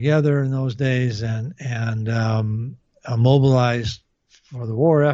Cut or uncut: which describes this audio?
uncut